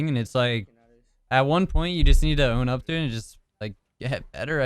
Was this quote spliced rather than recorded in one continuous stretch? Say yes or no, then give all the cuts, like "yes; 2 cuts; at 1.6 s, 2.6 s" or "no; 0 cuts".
no; 0 cuts